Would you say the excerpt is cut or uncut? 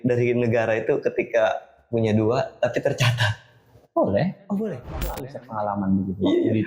cut